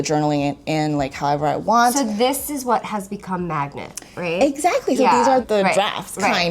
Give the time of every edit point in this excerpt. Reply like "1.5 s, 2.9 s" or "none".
5.4 s